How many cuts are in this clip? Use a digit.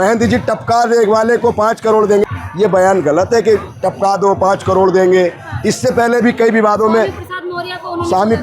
1